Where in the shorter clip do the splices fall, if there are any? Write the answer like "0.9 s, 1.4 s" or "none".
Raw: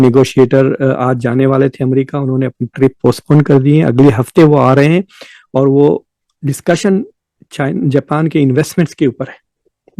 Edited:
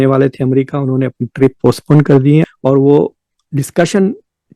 2.5 s